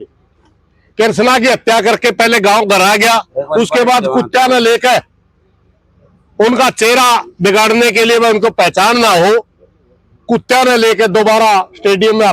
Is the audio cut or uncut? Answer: uncut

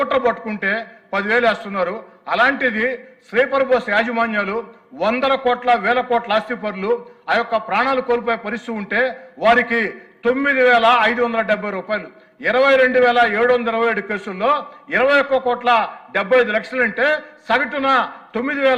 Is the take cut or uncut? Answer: uncut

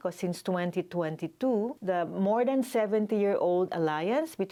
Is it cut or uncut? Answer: uncut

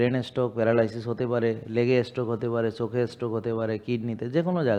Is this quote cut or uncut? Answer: uncut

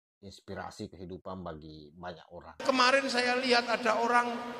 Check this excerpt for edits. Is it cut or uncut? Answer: cut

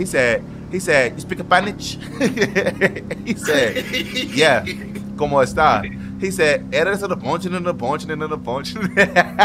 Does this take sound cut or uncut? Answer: uncut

